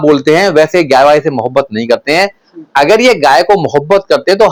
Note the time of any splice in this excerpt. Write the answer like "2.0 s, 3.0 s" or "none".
none

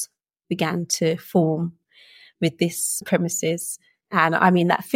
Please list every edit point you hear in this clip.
3.0 s

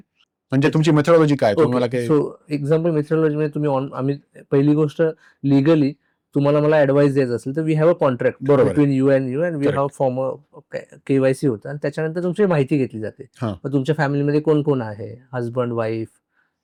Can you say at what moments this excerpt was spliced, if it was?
none

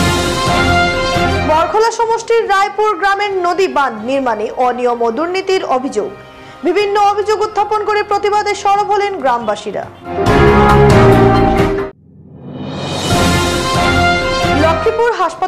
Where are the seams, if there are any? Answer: 1.1 s

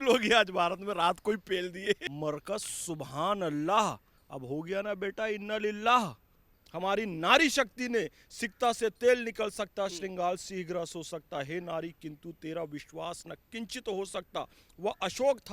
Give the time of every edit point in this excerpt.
2.1 s, 6.6 s

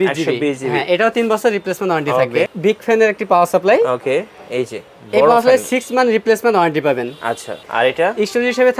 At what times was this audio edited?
2.5 s, 7.6 s

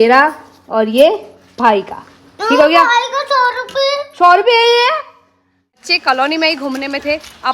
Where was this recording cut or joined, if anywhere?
5.9 s

